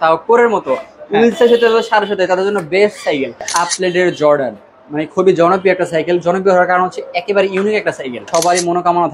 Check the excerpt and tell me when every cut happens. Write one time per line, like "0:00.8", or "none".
0:03.5
0:08.3